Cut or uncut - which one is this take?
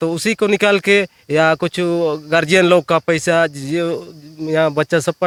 uncut